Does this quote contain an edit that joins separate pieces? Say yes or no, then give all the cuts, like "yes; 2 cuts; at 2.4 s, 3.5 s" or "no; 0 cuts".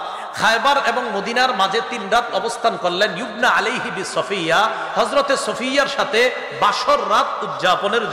no; 0 cuts